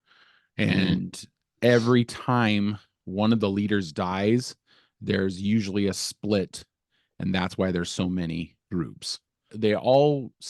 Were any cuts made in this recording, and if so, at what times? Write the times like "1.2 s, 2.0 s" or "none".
9.5 s